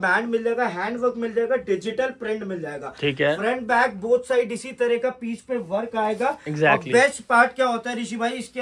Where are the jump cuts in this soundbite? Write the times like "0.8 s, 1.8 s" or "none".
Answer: none